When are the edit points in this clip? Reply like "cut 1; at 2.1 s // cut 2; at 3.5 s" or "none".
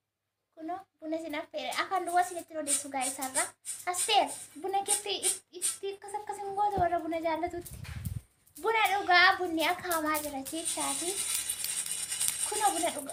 none